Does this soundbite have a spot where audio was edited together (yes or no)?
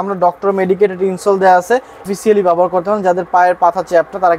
yes